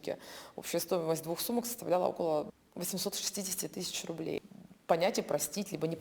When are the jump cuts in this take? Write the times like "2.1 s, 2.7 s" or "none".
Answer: 2.6 s, 4.5 s